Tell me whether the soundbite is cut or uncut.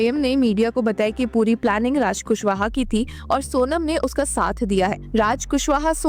uncut